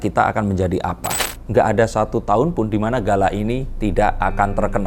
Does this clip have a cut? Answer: yes; 1 cut; at 1.2 s

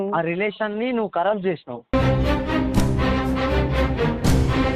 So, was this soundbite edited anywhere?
no; 0 cuts

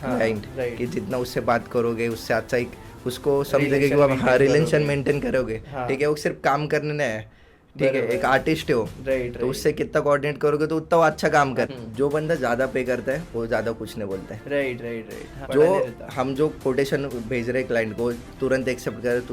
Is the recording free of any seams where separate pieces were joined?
no; 2 cuts; at 11.7 s, 15.4 s

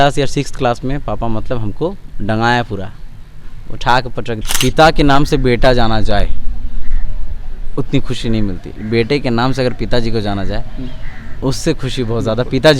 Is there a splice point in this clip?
yes; 1 cut; at 4.4 s

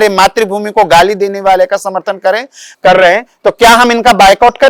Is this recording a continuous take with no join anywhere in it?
yes; 0 cuts

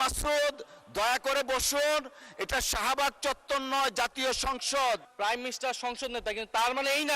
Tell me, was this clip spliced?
yes; 1 cut; at 5.1 s

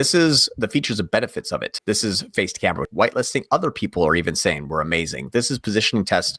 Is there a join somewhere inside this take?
yes; 2 cuts; at 1.7 s, 2.9 s

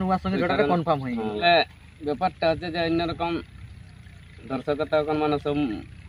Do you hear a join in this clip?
yes; 1 cut; at 1.4 s

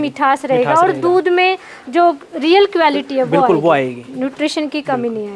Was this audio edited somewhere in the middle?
no; 0 cuts

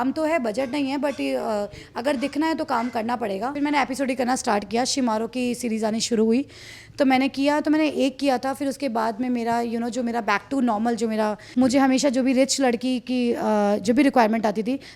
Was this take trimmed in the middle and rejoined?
yes; 2 cuts; at 3.5 s, 11.4 s

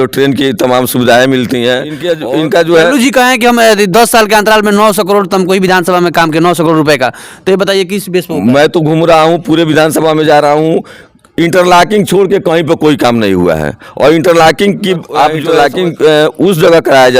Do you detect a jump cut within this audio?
yes; 2 cuts; at 2.0 s, 15.5 s

